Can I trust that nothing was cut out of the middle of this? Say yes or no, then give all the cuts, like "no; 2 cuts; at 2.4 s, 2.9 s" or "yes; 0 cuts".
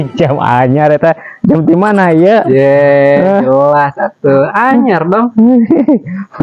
yes; 0 cuts